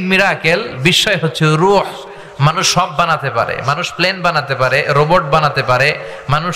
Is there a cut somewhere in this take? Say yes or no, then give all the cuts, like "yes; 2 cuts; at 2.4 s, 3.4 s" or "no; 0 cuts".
no; 0 cuts